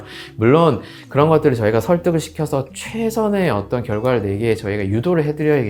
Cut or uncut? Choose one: uncut